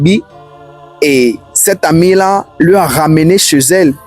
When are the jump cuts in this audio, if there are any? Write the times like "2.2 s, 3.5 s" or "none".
none